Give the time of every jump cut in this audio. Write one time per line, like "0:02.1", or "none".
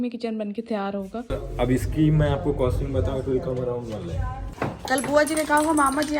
0:01.5
0:04.5